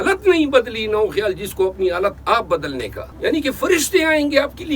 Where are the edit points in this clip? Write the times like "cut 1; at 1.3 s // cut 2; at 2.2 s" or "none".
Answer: cut 1; at 3.0 s